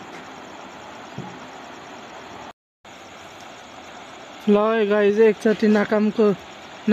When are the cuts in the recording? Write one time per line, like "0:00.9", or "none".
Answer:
0:02.7

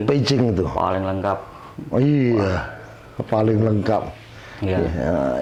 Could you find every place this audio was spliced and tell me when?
none

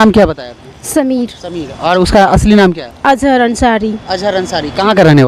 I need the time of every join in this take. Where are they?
none

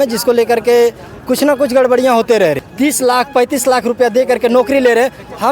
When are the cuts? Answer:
0:02.6

